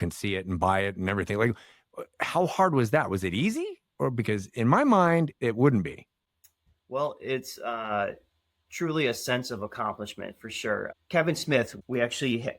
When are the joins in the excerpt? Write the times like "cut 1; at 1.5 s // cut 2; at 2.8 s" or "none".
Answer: cut 1; at 10.9 s // cut 2; at 11.8 s

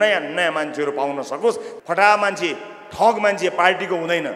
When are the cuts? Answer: cut 1; at 1.7 s

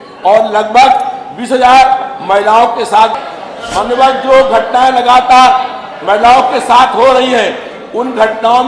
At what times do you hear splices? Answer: cut 1; at 3.2 s

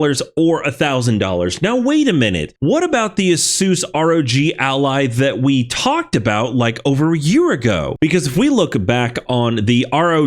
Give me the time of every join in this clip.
cut 1; at 2.5 s

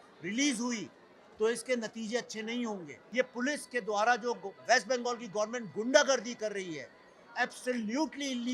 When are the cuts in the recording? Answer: cut 1; at 2.9 s

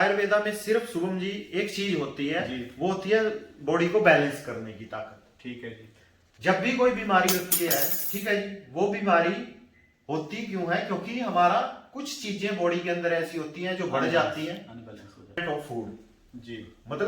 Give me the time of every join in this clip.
cut 1; at 15.4 s

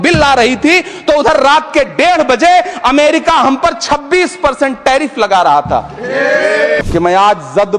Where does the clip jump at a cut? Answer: cut 1; at 6.8 s

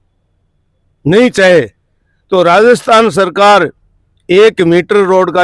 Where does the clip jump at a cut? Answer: none

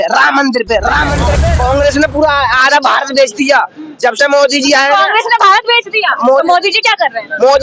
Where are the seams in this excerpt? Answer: cut 1; at 1.3 s

